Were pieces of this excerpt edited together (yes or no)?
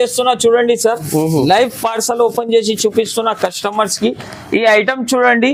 no